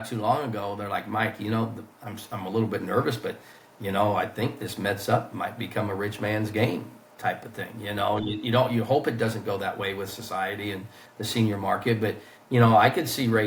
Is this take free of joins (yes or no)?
yes